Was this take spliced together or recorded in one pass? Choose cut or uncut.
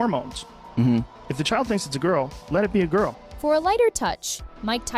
uncut